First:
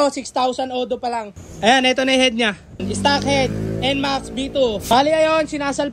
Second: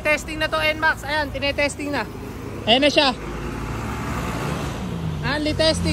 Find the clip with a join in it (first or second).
first